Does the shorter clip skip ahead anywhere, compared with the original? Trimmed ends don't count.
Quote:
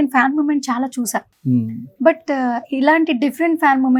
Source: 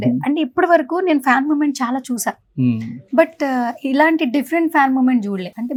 no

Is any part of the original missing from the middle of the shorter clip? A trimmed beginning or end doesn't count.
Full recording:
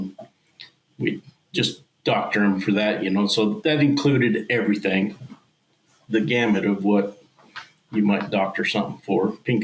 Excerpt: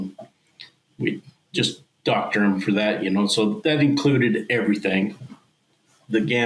no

